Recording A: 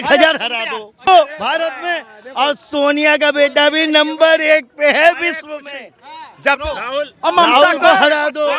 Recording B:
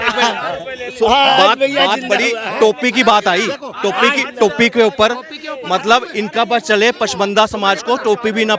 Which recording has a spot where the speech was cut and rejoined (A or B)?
A